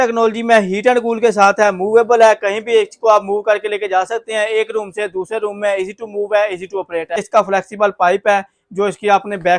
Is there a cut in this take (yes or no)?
yes